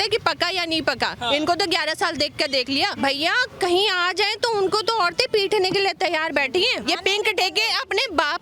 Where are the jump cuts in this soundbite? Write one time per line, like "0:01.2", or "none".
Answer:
0:02.9
0:06.8